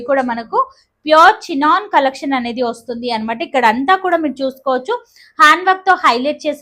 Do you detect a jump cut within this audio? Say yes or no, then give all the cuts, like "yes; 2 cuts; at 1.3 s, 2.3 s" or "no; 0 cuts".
no; 0 cuts